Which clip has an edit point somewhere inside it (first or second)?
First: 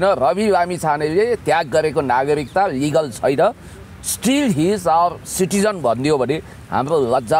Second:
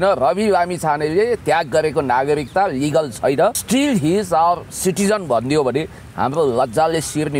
second